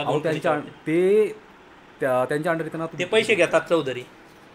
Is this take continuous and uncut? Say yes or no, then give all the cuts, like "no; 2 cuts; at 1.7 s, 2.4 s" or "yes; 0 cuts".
yes; 0 cuts